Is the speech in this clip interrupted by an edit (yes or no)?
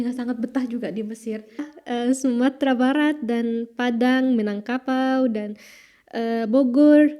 yes